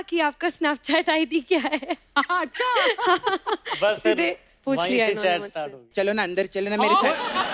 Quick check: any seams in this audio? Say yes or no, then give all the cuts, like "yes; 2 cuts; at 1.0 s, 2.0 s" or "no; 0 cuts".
yes; 1 cut; at 5.8 s